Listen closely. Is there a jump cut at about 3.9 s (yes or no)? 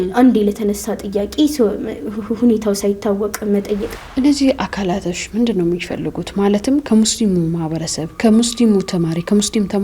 yes